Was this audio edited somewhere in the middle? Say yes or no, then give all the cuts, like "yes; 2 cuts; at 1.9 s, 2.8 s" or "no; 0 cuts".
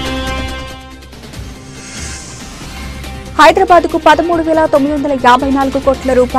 no; 0 cuts